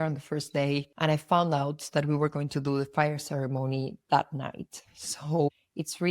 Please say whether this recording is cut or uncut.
cut